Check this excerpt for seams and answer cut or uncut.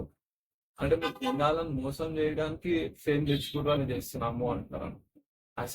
cut